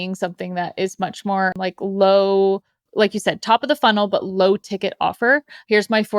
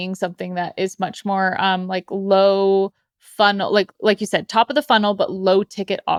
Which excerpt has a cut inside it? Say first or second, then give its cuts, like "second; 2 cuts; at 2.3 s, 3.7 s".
first; 2 cuts; at 1.5 s, 2.9 s